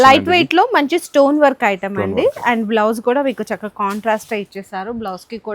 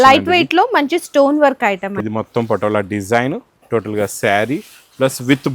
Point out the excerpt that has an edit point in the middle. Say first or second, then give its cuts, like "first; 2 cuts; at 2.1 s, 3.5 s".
second; 1 cut; at 2.0 s